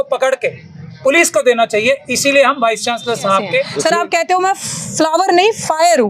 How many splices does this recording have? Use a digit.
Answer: 1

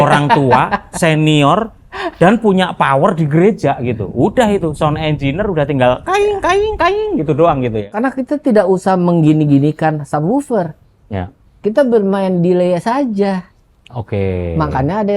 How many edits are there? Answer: 1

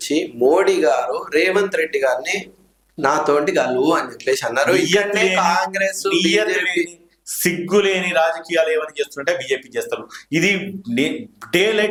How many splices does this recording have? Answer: 0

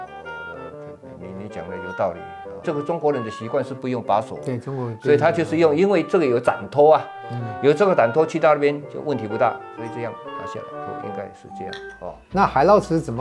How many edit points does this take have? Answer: 0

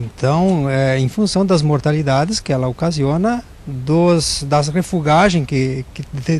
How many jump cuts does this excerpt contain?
1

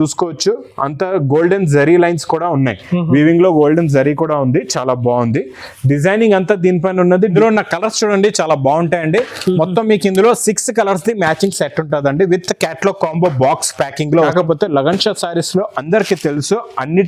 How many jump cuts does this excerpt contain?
2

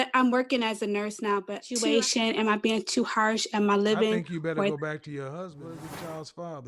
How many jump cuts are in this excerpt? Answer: 2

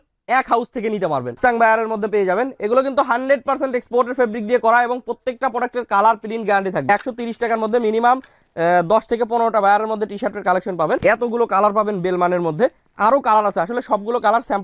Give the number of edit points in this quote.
3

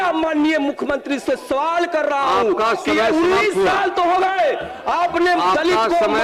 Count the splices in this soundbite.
0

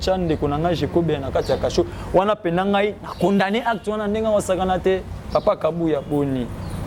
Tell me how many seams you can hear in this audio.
0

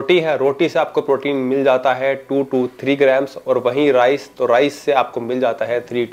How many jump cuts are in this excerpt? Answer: 0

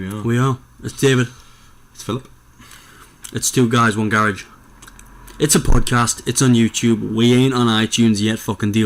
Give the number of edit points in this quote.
1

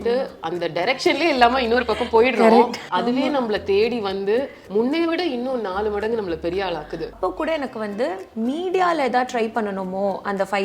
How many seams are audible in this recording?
3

